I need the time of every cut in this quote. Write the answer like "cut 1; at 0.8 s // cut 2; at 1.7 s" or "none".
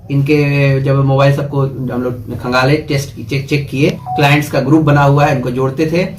cut 1; at 4.0 s